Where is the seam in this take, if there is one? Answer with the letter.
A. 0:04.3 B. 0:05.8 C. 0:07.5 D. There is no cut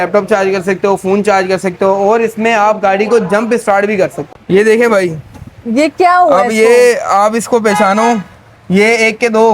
A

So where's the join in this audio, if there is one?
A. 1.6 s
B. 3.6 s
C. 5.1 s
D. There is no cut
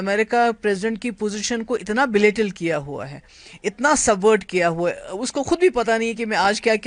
D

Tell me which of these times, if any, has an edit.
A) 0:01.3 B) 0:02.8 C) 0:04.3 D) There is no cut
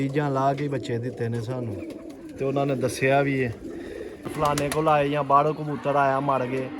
C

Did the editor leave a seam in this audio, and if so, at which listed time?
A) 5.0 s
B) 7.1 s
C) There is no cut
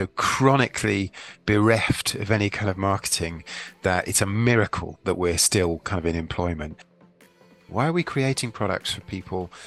B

